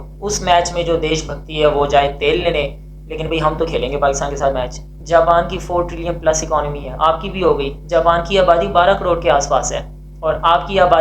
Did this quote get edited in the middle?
yes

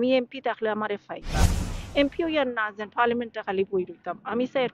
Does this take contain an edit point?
yes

